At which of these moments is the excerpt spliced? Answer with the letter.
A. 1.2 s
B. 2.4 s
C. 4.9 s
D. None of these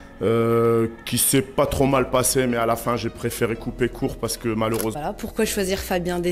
C